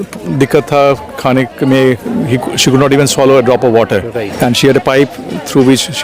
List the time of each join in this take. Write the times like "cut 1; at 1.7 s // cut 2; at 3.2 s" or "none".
cut 1; at 4.2 s